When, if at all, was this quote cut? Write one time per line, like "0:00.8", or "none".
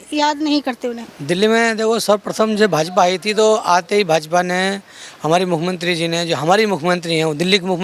0:01.0